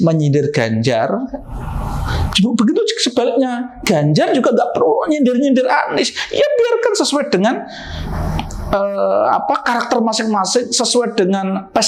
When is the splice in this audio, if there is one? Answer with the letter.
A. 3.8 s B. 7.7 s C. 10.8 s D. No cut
D